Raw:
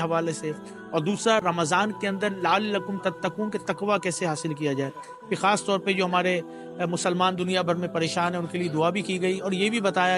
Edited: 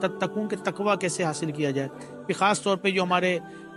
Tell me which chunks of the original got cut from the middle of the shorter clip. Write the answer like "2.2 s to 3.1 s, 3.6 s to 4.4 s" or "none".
none